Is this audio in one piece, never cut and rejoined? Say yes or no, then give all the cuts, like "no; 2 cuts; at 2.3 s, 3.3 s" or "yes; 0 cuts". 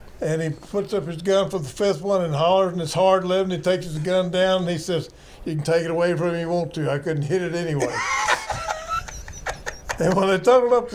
yes; 0 cuts